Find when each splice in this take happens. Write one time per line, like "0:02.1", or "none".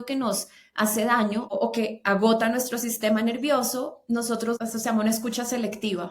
0:01.5
0:04.6